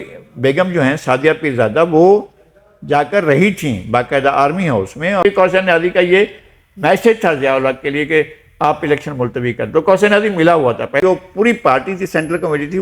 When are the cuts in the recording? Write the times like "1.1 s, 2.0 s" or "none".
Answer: 5.2 s, 11.0 s